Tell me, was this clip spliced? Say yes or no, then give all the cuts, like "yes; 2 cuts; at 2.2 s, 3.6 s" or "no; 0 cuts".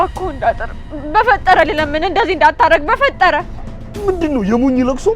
no; 0 cuts